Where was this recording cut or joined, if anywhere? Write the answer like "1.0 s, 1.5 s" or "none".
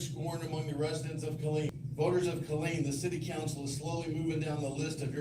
1.7 s